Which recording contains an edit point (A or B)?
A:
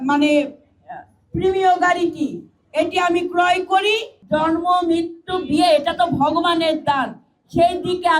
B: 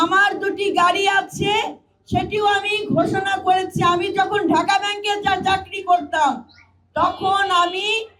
A